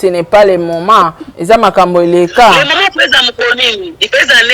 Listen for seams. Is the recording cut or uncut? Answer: cut